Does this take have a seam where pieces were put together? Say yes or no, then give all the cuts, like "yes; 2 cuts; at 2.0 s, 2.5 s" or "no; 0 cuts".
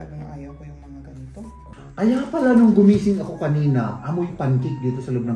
yes; 1 cut; at 1.6 s